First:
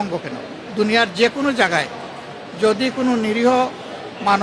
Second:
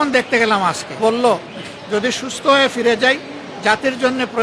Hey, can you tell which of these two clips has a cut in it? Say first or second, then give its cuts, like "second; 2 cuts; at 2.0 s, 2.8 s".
second; 1 cut; at 1.0 s